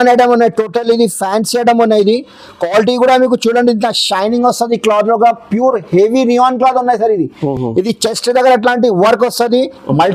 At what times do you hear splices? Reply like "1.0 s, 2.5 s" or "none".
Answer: none